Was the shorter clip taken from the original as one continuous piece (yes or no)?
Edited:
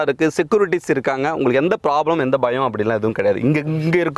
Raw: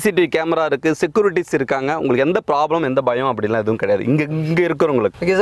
yes